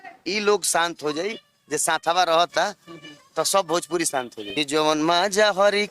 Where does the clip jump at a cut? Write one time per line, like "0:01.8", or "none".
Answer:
0:04.4